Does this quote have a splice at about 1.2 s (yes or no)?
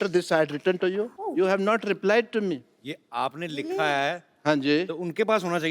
yes